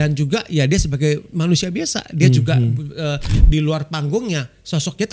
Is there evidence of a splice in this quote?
yes; 1 cut; at 3.4 s

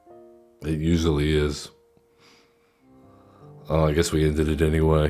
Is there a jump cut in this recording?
yes; 1 cut; at 2.9 s

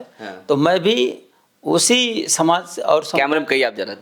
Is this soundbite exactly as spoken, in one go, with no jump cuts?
yes; 0 cuts

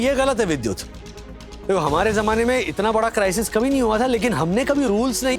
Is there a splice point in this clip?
no; 0 cuts

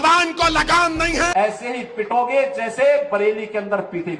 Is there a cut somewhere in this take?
yes; 1 cut; at 1.3 s

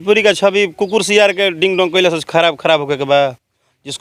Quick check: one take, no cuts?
yes; 0 cuts

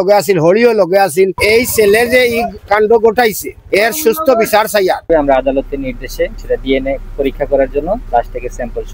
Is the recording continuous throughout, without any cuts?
no; 4 cuts; at 1.4 s, 5.1 s, 6.4 s, 8.0 s

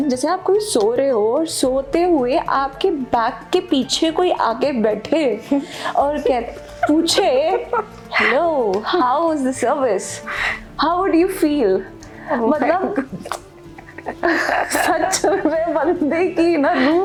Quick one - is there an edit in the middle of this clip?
no; 0 cuts

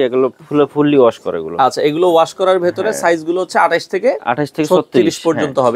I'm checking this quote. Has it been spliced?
no; 0 cuts

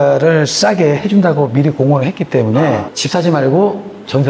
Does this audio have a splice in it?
yes; 1 cut; at 3.0 s

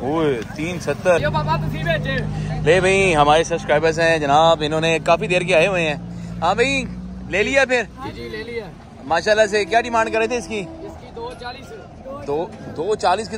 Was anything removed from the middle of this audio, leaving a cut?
yes; 1 cut; at 1.2 s

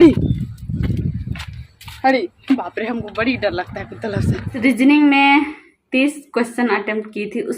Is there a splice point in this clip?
yes; 1 cut; at 4.6 s

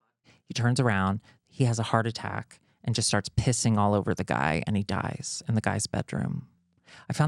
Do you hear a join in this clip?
no; 0 cuts

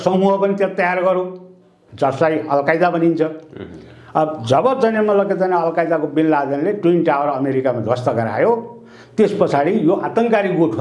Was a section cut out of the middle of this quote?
no; 0 cuts

